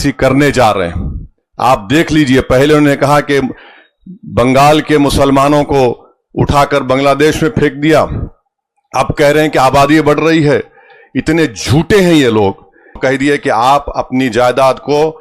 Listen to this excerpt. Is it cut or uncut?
cut